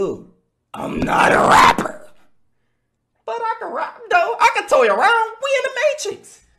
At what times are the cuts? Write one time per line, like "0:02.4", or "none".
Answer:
none